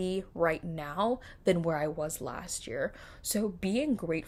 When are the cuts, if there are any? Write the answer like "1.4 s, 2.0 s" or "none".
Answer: none